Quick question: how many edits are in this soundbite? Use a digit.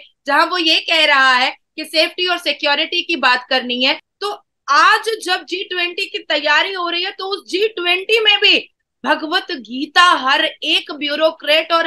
1